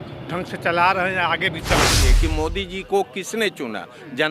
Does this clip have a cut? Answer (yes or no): yes